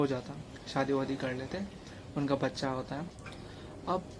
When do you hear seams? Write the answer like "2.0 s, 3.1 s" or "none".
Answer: 3.0 s